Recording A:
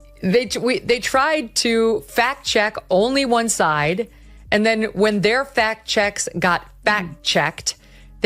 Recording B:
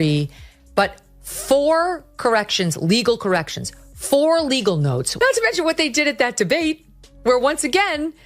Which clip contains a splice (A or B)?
B